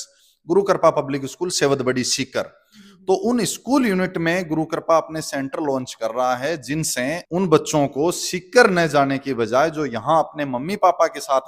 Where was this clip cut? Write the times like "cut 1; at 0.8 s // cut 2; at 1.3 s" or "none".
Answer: none